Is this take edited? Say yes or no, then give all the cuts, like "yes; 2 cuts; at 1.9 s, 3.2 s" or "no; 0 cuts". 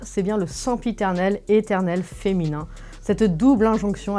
no; 0 cuts